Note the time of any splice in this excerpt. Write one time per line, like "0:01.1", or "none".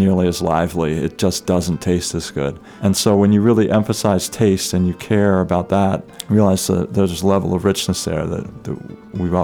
0:02.6
0:06.1